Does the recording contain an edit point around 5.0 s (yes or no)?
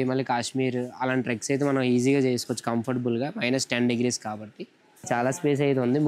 yes